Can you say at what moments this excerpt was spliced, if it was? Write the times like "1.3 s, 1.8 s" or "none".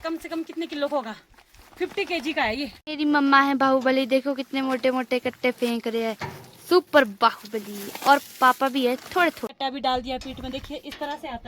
2.8 s, 9.5 s